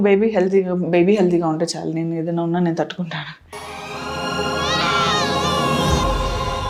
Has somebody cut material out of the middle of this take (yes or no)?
no